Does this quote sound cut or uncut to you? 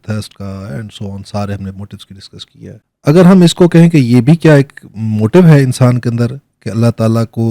cut